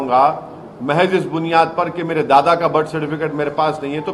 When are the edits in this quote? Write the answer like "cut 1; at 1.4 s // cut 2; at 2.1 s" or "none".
none